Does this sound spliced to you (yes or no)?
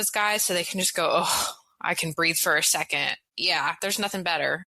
yes